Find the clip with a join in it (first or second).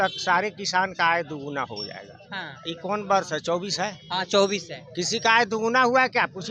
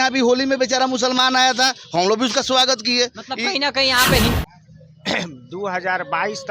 second